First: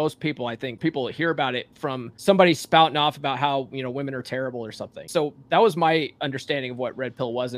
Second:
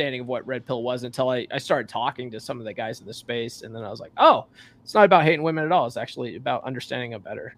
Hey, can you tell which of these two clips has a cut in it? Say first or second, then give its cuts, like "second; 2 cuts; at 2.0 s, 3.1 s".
first; 3 cuts; at 0.8 s, 2.1 s, 5.1 s